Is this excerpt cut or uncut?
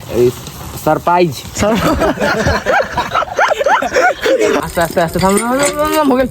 cut